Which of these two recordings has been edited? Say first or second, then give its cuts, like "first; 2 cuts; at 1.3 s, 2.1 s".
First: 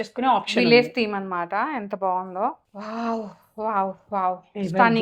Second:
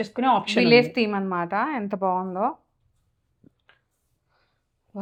first; 1 cut; at 2.7 s